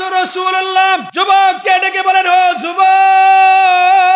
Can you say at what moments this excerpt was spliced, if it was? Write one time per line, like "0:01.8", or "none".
0:01.1